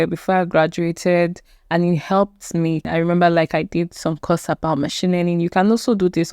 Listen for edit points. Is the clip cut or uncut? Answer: cut